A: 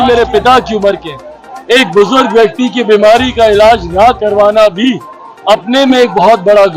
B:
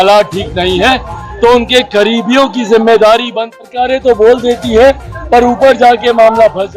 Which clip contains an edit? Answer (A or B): B